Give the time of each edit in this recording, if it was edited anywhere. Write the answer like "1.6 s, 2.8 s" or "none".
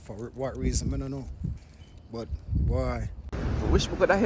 3.3 s

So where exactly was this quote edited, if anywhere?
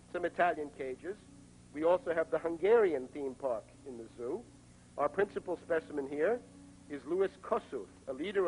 none

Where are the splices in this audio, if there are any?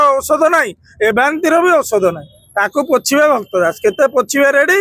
none

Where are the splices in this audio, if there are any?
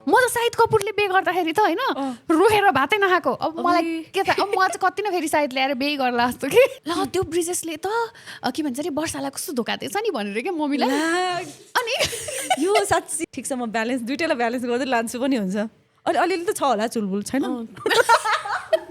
6.8 s, 13.1 s

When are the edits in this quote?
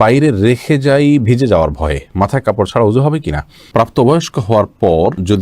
3.6 s

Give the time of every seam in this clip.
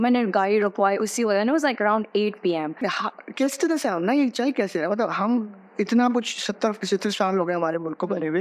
2.8 s

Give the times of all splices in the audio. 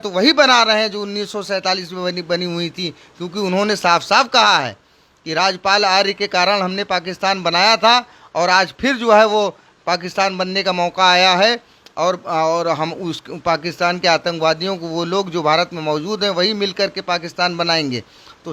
none

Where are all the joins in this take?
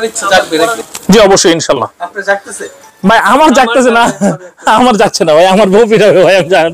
none

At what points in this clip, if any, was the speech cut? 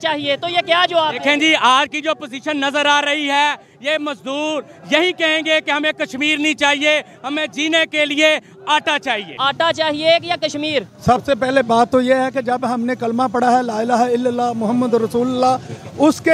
9.4 s

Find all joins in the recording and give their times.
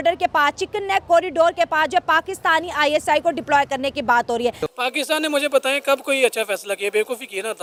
none

